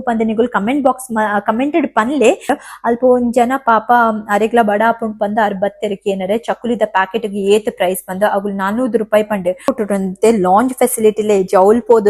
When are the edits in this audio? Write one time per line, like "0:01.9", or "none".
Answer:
0:02.5
0:09.7

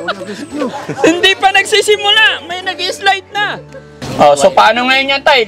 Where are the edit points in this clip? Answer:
0:04.0

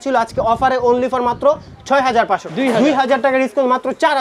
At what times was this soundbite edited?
0:02.5

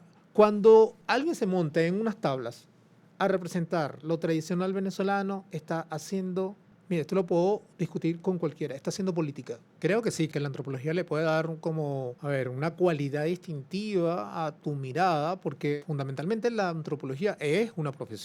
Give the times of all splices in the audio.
0:01.0
0:06.7
0:09.7
0:10.3
0:12.1
0:15.8

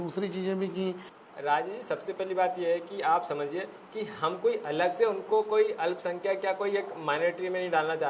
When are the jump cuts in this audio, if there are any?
0:01.1

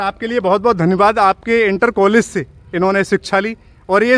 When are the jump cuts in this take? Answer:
none

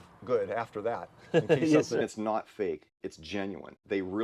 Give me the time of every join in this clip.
0:02.0

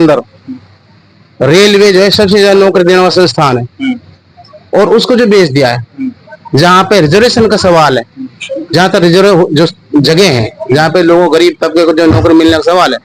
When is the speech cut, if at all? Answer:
none

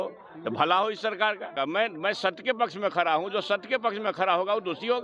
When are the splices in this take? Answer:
0:01.5

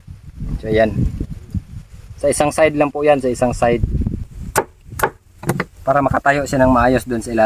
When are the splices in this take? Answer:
0:04.2

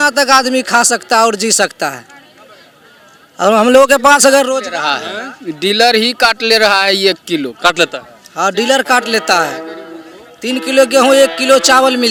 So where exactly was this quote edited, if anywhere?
none

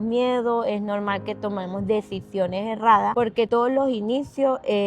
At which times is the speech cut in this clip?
0:03.3

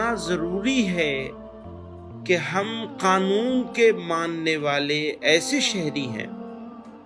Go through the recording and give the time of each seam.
none

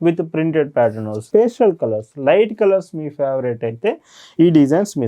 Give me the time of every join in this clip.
0:01.2

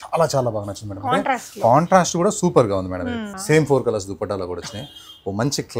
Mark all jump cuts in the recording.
0:03.3

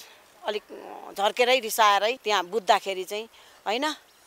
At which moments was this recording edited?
0:02.2

